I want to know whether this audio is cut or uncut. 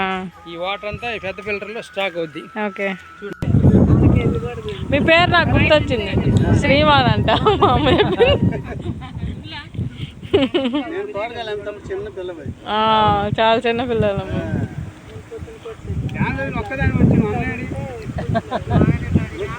cut